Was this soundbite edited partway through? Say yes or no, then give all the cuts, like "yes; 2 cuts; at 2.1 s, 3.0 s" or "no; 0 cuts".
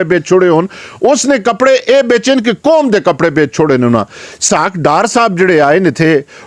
yes; 1 cut; at 4.5 s